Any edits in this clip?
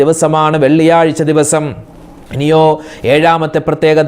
no; 0 cuts

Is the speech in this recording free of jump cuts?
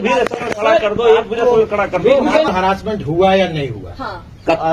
no; 1 cut; at 2.5 s

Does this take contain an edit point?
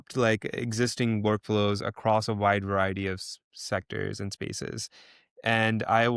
no; 0 cuts

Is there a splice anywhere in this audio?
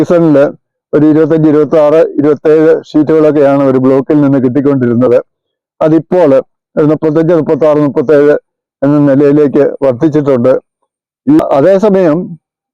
yes; 1 cut; at 11.4 s

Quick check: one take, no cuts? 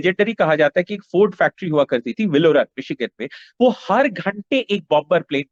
yes; 0 cuts

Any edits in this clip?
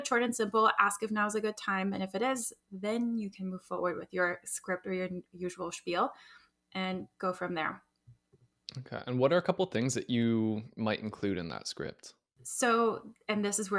no; 0 cuts

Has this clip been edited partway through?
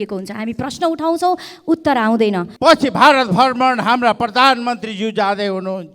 yes; 1 cut; at 2.5 s

